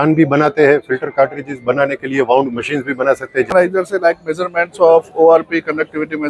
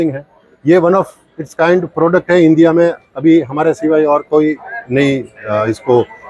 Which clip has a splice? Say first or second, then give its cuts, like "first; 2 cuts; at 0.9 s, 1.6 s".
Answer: first; 1 cut; at 3.5 s